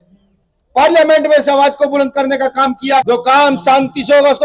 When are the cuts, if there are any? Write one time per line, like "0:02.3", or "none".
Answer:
0:03.1